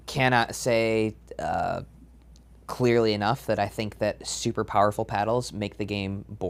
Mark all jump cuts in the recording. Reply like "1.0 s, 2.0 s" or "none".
none

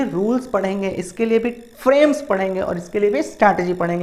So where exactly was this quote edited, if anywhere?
none

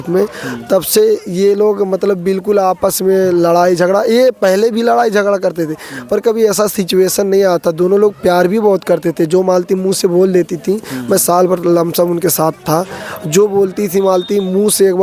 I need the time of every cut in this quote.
none

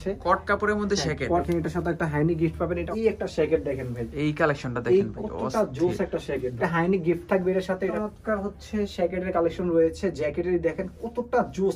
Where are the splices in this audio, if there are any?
1.4 s, 2.9 s, 6.6 s, 7.9 s

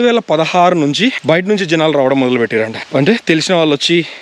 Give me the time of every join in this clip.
1.2 s, 2.8 s

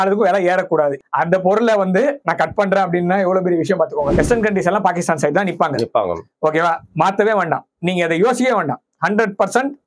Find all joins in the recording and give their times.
1.0 s, 4.1 s

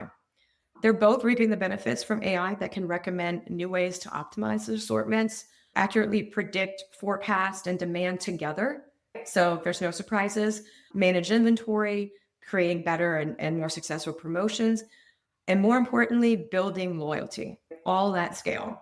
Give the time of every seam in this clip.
9.2 s, 17.7 s

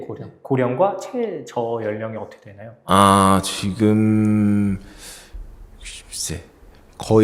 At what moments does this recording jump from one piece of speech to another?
none

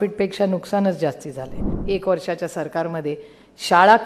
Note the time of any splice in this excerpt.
1.7 s

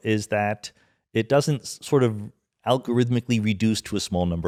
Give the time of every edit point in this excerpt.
none

